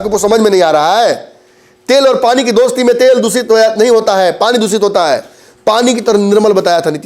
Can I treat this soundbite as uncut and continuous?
yes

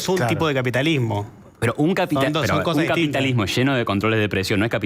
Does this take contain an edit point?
no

